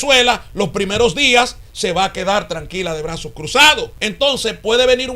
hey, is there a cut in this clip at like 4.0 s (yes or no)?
yes